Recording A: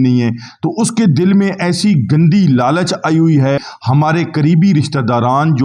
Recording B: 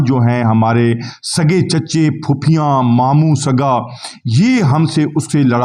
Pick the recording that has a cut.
A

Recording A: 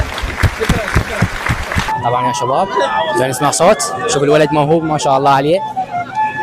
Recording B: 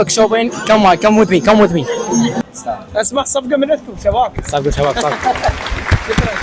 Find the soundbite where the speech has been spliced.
B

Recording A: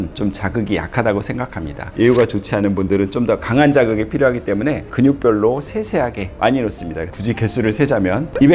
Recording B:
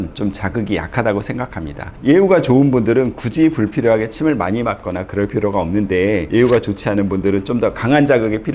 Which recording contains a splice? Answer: A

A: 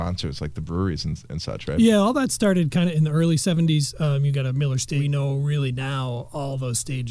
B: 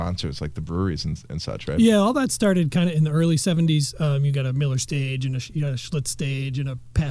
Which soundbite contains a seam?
A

